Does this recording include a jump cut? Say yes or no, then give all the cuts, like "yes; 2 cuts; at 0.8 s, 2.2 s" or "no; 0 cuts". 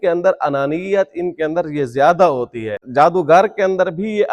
yes; 1 cut; at 2.8 s